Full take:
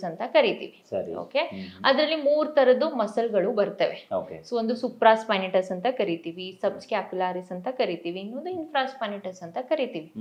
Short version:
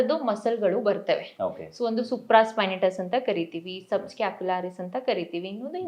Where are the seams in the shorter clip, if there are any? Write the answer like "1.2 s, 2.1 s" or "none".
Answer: none